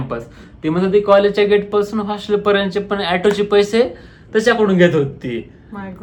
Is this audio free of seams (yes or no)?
yes